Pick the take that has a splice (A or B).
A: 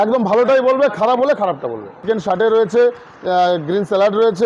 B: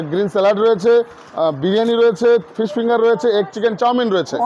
A